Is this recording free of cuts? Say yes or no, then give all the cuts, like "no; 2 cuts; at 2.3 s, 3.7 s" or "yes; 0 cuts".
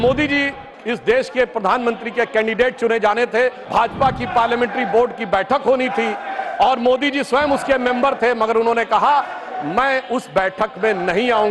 no; 1 cut; at 3.6 s